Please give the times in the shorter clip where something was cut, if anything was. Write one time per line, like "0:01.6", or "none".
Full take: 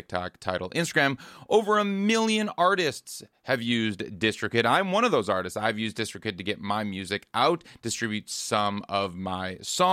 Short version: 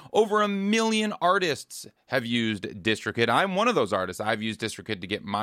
none